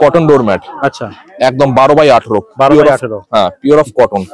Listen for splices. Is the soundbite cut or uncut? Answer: uncut